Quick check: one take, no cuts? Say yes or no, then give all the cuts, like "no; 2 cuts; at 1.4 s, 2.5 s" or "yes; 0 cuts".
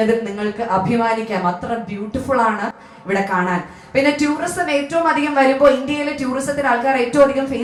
yes; 0 cuts